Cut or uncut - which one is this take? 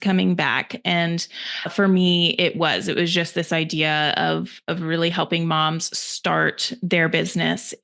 uncut